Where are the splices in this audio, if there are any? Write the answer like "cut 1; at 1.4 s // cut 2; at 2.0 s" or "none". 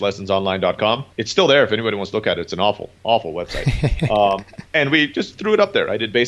cut 1; at 1.1 s // cut 2; at 4.6 s